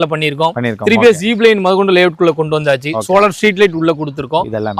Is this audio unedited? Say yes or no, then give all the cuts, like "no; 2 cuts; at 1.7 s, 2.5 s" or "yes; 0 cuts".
yes; 0 cuts